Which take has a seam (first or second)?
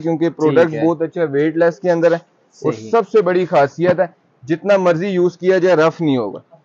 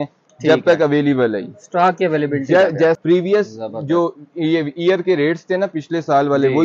second